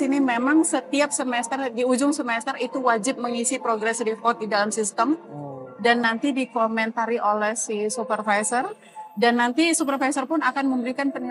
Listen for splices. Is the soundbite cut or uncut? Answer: uncut